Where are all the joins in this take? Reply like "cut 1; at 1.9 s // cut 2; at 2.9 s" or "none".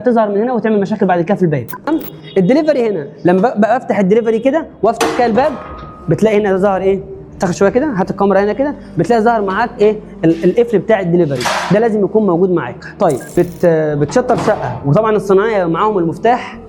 cut 1; at 1.9 s // cut 2; at 13.4 s

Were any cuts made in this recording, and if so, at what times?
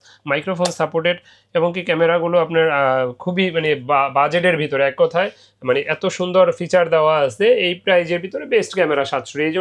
none

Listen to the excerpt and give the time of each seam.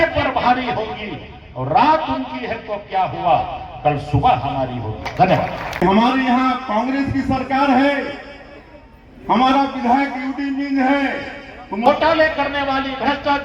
cut 1; at 5.8 s // cut 2; at 11.9 s

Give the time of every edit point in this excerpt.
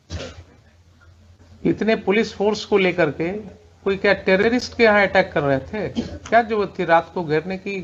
none

